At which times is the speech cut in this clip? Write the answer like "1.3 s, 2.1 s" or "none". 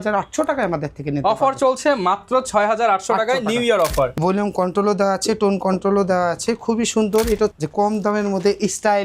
4.1 s, 7.5 s

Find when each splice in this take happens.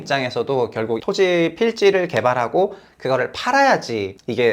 1.0 s

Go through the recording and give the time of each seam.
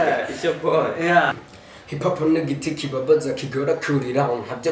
1.5 s

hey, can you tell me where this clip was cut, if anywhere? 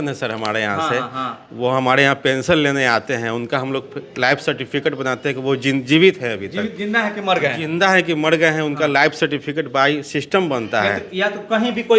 none

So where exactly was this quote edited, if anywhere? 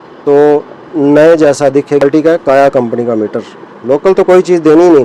2.0 s

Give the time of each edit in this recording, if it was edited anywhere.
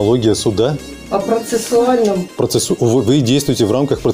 0.9 s, 2.3 s

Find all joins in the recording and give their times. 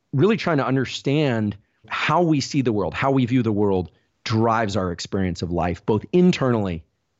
1.9 s

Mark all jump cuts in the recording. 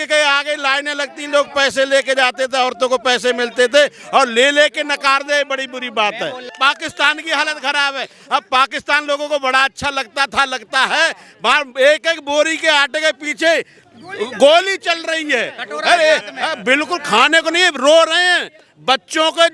6.5 s

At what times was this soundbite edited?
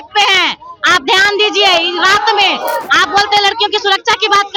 none

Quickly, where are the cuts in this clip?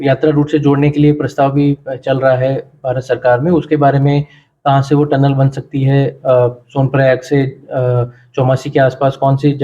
none

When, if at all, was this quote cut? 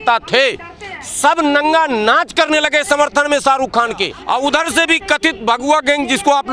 4.1 s

